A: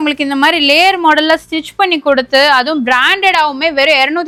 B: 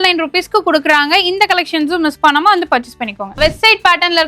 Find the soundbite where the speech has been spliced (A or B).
B